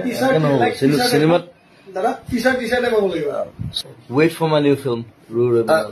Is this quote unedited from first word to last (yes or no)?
no